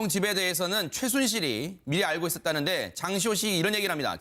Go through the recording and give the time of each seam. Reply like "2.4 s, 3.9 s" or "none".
none